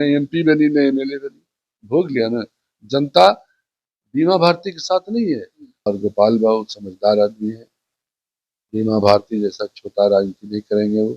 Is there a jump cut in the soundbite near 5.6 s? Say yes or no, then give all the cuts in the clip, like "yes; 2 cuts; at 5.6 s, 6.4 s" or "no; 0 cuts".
yes; 1 cut; at 5.6 s